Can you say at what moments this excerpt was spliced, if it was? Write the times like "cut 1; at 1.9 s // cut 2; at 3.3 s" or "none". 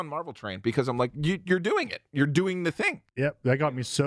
cut 1; at 3.0 s